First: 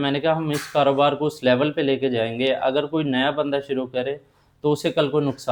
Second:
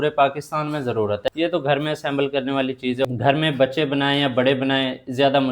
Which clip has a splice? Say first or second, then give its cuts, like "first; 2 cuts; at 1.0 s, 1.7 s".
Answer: second; 2 cuts; at 1.3 s, 3.0 s